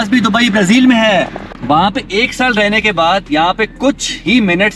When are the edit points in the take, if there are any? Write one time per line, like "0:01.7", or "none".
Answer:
0:01.5

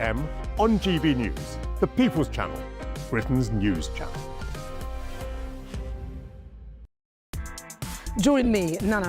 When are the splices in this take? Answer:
0:06.8

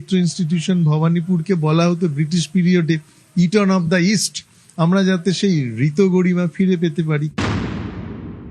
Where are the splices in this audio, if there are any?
0:07.3

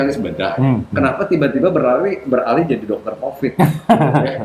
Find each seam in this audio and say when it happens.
none

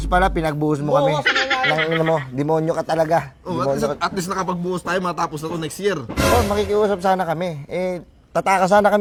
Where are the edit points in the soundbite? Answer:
none

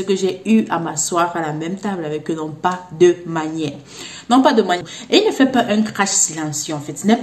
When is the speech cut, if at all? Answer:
0:04.8

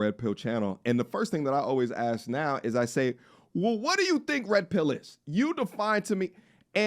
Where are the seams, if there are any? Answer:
none

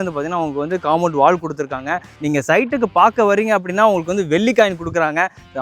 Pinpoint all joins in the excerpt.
0:02.1

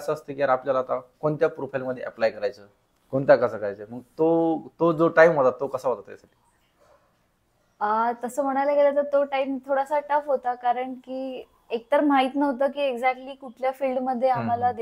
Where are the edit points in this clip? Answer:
none

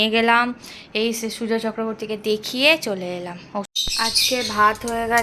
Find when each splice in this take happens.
0:03.7

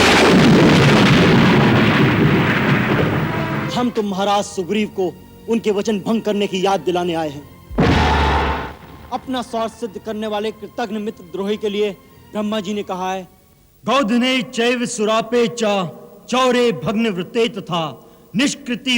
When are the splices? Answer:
0:03.6

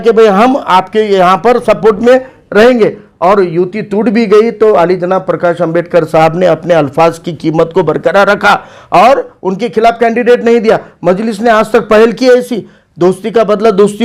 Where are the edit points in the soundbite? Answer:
none

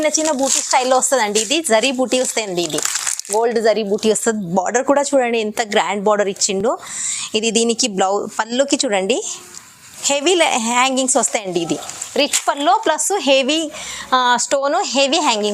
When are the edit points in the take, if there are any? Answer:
none

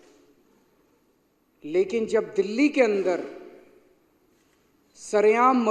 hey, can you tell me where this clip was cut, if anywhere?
none

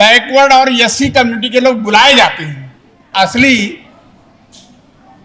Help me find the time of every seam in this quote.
0:03.1

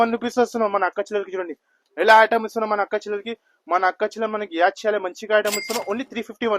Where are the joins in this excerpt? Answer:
none

